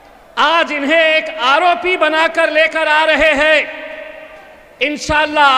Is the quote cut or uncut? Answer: uncut